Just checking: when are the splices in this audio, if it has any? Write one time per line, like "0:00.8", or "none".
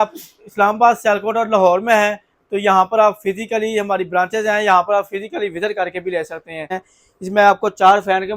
0:06.9